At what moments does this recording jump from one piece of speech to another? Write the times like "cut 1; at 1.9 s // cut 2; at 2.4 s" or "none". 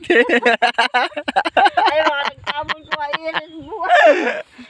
none